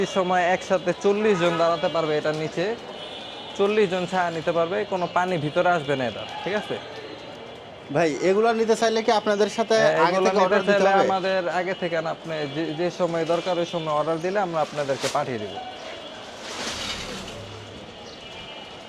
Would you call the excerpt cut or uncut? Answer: uncut